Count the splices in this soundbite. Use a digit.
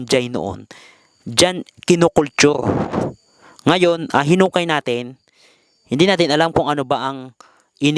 0